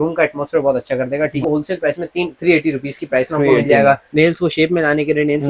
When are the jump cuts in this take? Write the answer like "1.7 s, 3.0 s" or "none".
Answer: 1.4 s, 4.1 s